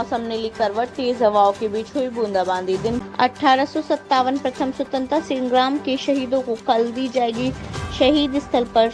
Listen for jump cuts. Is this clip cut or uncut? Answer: cut